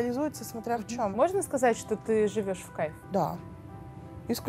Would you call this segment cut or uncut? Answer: cut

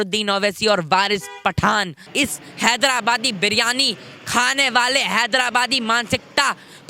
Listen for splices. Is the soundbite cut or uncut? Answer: cut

